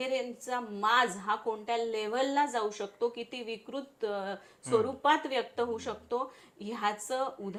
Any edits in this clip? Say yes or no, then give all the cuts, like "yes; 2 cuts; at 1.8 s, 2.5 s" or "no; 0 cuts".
no; 0 cuts